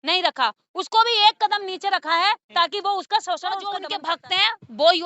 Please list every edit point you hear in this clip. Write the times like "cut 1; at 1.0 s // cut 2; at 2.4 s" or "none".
cut 1; at 3.9 s